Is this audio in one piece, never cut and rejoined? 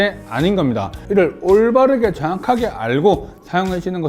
no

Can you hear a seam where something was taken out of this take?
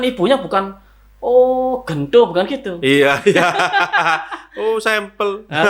no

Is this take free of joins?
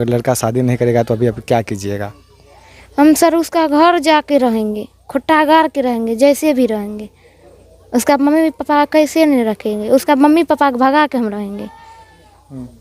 yes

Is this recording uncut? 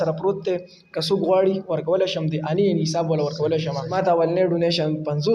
no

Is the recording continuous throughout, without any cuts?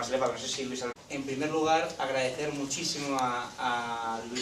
yes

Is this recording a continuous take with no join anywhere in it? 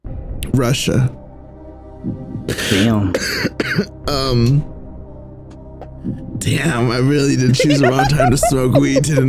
yes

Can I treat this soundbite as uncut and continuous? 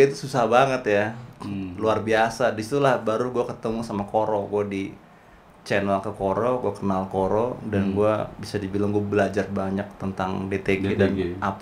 yes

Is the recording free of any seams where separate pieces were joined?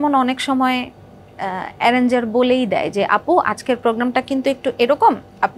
yes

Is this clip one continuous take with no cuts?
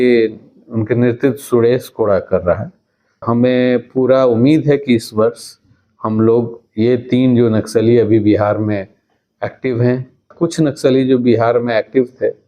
no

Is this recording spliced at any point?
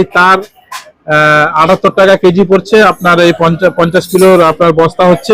no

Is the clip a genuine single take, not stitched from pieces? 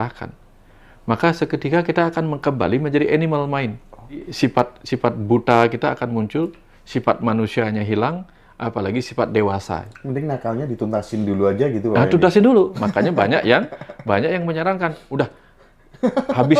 no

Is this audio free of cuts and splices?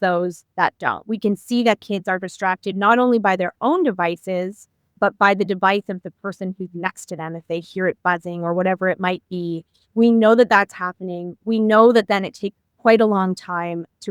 no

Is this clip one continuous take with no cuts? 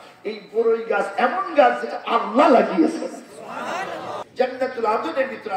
no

